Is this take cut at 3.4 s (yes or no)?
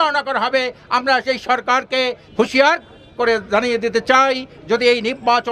no